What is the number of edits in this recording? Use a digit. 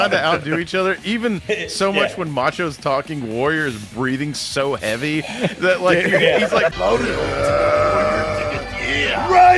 1